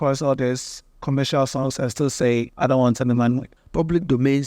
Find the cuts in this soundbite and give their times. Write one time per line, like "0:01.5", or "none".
0:02.5
0:03.6